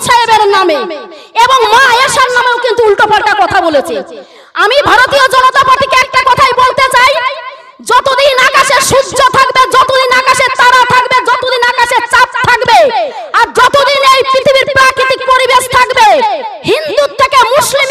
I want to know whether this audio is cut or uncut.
uncut